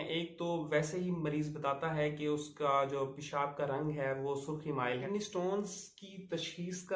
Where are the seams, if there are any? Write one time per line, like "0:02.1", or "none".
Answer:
0:05.0